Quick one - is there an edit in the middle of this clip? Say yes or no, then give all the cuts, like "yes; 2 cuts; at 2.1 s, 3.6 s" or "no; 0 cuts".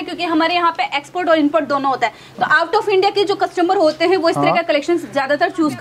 no; 0 cuts